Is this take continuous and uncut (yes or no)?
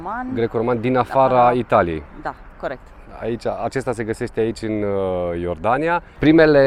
yes